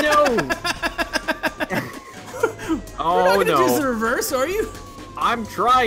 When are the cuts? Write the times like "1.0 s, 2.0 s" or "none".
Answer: 2.0 s